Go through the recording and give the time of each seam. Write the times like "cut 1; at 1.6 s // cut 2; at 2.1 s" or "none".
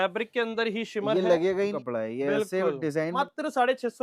cut 1; at 1.8 s // cut 2; at 3.2 s